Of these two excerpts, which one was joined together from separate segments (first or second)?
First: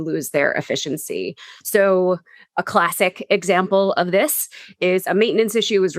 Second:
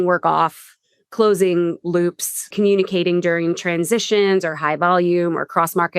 second